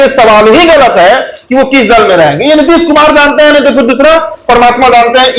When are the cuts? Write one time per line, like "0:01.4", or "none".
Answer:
none